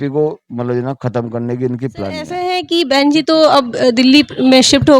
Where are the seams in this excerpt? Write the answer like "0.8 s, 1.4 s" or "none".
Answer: 2.4 s